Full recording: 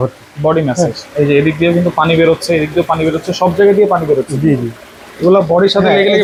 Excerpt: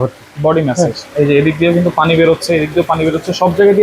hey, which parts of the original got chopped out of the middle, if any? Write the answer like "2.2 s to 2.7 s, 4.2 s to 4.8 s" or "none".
none